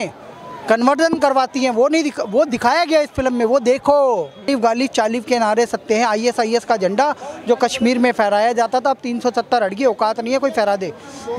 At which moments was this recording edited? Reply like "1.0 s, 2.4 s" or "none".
4.4 s